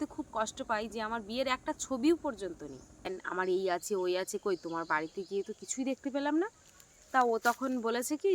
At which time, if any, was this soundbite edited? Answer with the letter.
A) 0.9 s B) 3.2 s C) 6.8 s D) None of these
B